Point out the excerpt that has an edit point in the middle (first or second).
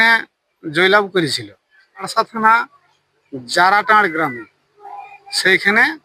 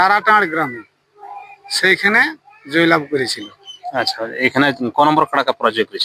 first